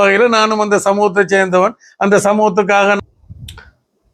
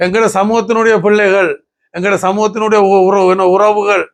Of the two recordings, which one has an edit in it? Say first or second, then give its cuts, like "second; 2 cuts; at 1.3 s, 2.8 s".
first; 1 cut; at 3.0 s